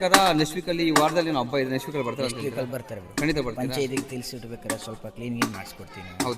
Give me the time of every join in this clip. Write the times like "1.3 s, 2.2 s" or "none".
none